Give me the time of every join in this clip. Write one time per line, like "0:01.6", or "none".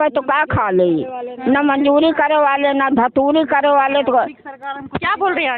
none

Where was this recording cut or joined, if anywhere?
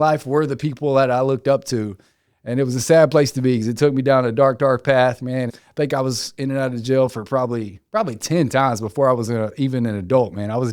0:05.6

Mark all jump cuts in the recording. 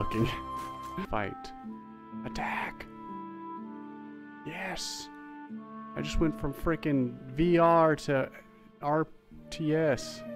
0:01.1

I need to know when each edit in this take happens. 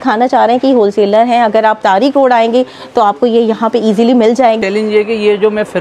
0:04.6

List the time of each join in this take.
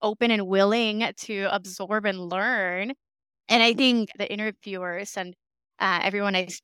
0:04.1

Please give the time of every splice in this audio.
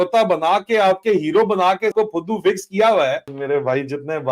0:01.9
0:03.3

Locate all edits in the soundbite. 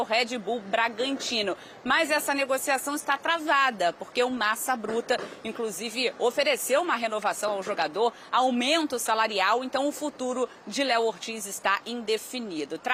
none

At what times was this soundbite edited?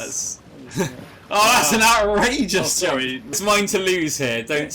0:03.4

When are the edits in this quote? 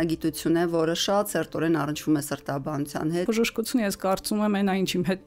0:03.2

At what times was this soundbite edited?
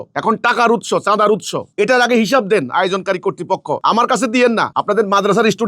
0:03.8
0:04.7

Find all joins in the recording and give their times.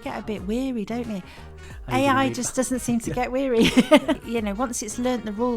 0:04.2

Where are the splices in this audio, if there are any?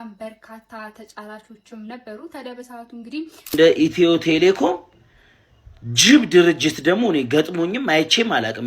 0:03.5

